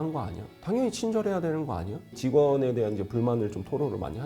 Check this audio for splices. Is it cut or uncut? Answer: cut